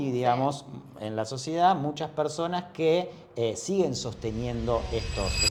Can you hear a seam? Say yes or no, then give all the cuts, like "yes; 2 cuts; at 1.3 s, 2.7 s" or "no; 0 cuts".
no; 0 cuts